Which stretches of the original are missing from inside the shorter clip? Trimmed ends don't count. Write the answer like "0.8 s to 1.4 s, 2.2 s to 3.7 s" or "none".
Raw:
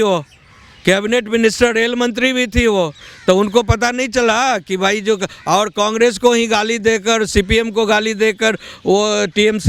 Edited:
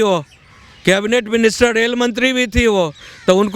none